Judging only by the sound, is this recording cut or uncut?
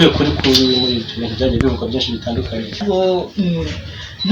cut